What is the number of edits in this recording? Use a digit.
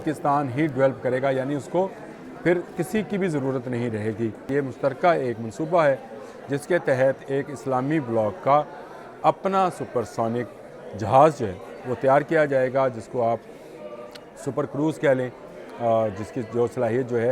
1